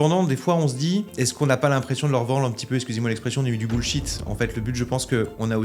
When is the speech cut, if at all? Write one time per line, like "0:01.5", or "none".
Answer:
0:01.1